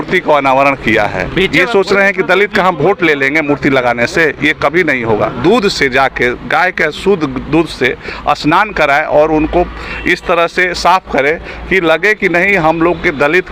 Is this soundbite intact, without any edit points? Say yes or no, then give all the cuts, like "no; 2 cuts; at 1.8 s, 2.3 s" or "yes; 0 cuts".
no; 2 cuts; at 1.5 s, 5.3 s